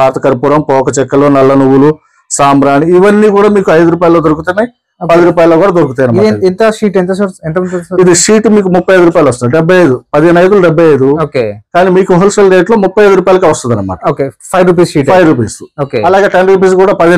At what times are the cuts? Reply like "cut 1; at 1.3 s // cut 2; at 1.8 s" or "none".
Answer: none